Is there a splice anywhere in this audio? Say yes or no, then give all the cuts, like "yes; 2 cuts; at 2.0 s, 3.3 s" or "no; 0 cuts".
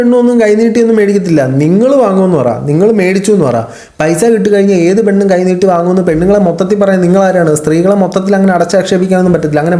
no; 0 cuts